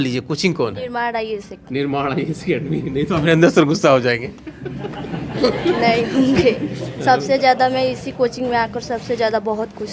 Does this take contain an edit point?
no; 0 cuts

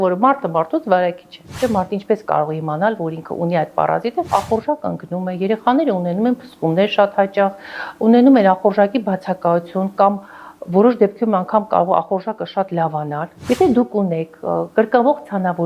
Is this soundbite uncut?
no; 3 cuts; at 1.5 s, 4.3 s, 13.3 s

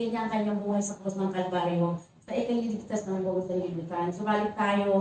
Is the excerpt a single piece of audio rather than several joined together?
yes; 0 cuts

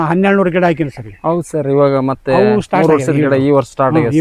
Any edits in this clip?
no; 0 cuts

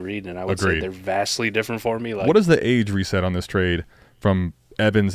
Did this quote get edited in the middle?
yes; 1 cut; at 2.2 s

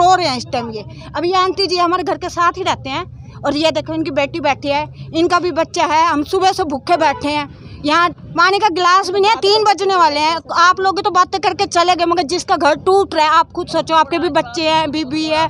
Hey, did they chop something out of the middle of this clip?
no; 0 cuts

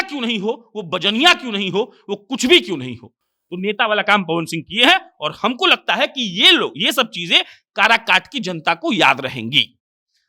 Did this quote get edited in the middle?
no; 0 cuts

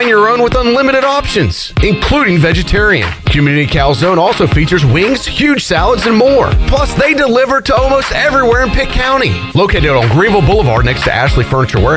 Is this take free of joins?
yes; 0 cuts

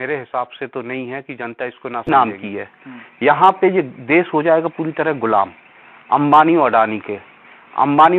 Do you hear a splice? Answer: yes; 1 cut; at 2.1 s

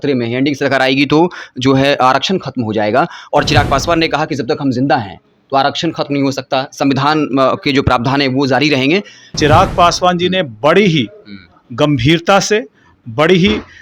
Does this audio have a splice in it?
yes; 1 cut; at 9.3 s

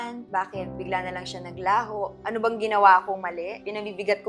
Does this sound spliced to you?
no; 0 cuts

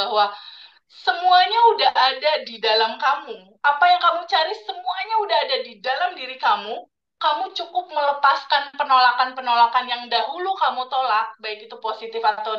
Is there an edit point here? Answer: no; 0 cuts

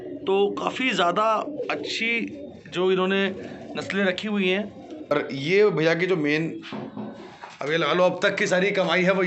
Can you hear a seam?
yes; 1 cut; at 5.1 s

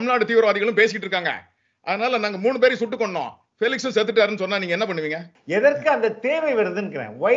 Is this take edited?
yes; 1 cut; at 5.3 s

